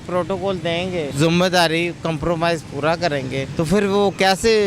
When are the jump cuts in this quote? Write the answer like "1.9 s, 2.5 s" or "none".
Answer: 1.1 s, 3.5 s